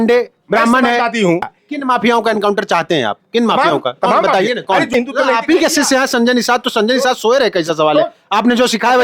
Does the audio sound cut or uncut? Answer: cut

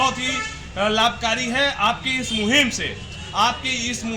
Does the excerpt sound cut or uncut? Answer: uncut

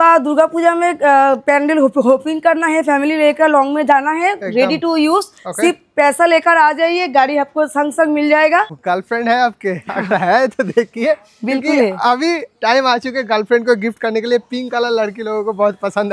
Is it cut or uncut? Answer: cut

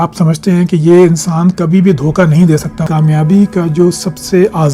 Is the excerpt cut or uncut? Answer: cut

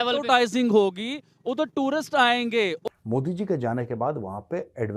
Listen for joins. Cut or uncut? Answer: cut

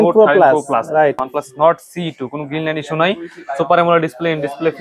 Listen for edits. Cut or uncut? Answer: cut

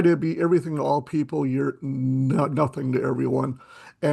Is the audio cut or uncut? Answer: uncut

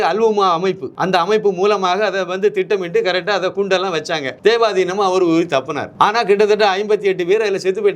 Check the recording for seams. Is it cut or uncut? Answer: cut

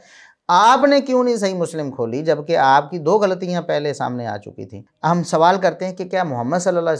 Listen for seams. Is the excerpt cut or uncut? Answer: cut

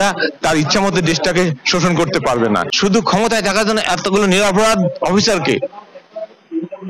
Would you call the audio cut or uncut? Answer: cut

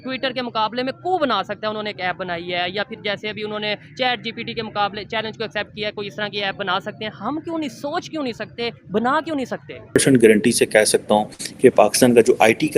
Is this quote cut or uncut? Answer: cut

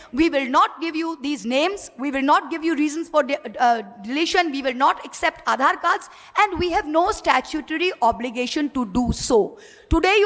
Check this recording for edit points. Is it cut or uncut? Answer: uncut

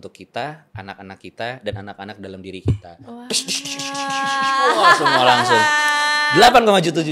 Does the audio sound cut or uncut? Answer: uncut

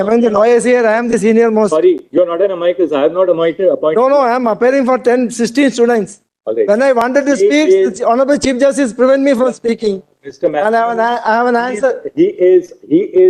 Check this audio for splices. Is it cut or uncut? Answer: uncut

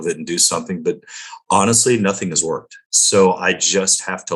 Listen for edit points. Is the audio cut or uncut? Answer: uncut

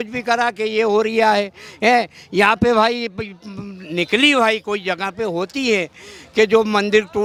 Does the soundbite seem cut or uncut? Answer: uncut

